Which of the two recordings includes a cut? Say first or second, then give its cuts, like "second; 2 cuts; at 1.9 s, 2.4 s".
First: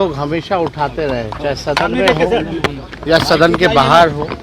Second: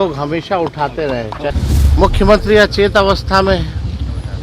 second; 1 cut; at 1.5 s